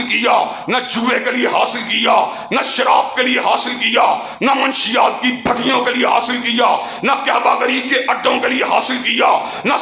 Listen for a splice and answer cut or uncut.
uncut